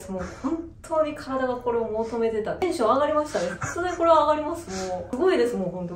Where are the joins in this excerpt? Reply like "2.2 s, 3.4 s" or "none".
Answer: 2.6 s, 5.1 s